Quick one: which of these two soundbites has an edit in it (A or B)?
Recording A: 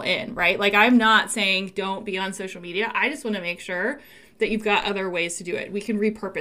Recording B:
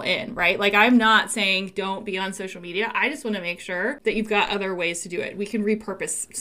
B